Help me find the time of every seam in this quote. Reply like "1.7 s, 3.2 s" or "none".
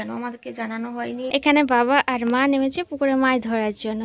1.3 s